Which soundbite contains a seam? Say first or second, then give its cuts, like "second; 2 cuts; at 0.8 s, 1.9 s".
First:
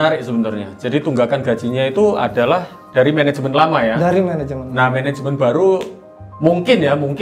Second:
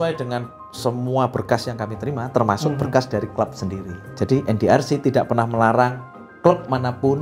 second; 1 cut; at 4.0 s